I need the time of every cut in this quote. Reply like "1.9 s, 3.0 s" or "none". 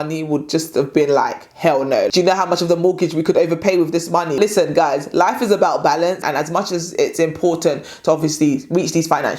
4.4 s